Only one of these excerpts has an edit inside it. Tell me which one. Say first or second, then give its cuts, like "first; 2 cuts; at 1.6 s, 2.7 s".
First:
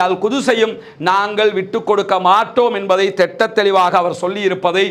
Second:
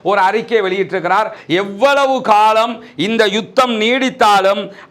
second; 1 cut; at 1.4 s